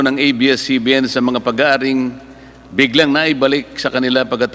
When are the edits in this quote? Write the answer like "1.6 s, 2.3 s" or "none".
none